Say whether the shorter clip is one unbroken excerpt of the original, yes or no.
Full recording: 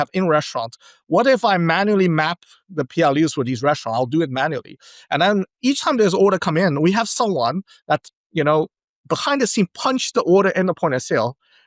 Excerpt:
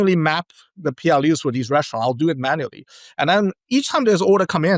yes